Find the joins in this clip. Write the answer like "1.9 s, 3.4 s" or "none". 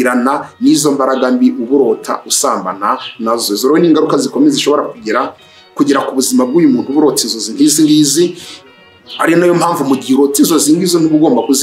none